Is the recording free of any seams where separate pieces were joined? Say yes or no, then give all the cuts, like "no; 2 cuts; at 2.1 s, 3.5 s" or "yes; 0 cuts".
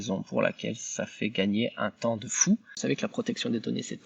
no; 1 cut; at 2.8 s